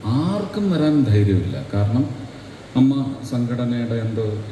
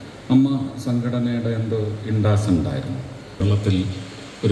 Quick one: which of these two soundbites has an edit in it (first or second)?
second